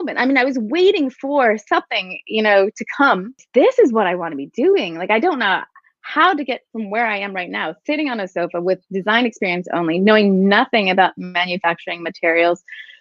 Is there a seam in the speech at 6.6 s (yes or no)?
no